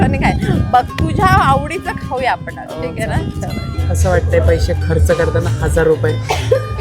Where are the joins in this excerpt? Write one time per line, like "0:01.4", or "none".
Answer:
0:03.7

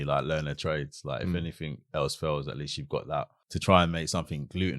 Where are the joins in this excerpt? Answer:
0:03.4

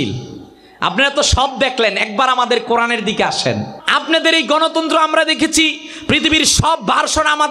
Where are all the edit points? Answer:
0:03.8

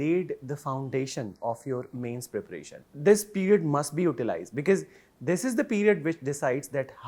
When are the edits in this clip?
0:02.8

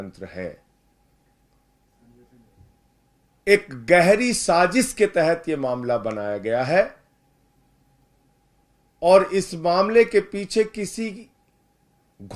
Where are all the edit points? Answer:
none

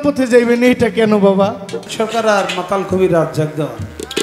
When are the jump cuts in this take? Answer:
0:01.9

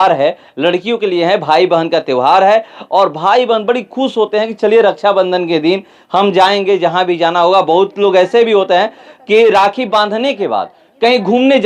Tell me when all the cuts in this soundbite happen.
none

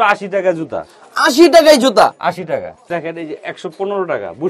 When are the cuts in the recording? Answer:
0:02.8

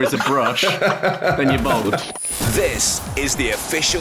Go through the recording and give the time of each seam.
0:02.1

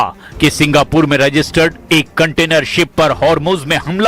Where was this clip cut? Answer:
0:01.1

